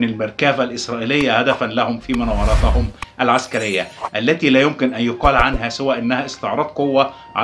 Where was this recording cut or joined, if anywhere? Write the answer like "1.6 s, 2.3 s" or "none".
none